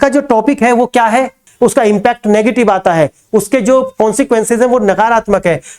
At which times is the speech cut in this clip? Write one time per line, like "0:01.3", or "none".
0:01.4